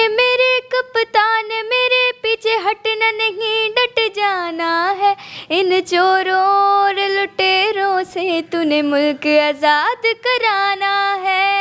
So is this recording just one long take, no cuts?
yes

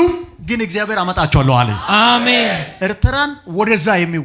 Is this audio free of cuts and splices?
no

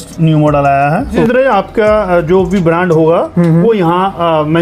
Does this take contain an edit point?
yes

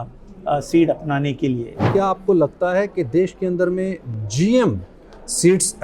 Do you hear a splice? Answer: yes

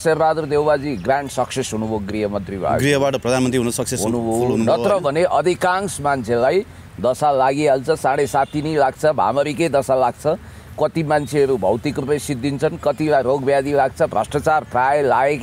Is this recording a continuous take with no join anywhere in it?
yes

